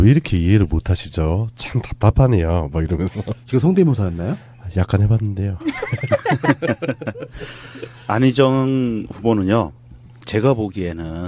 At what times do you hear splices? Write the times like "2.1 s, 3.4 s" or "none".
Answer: none